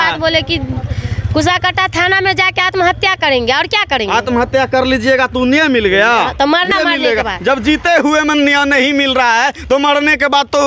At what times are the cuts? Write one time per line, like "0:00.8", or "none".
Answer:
0:06.7